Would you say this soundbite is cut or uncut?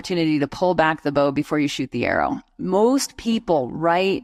uncut